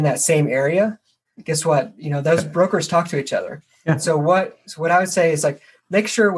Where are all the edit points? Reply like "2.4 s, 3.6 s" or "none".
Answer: none